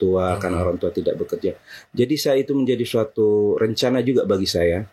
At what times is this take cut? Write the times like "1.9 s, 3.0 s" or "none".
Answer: none